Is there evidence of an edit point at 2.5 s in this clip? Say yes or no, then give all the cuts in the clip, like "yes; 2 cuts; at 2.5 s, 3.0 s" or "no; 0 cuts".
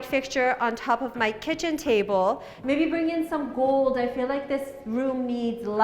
yes; 1 cut; at 2.5 s